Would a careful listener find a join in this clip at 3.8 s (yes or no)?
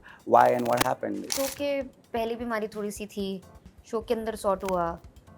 no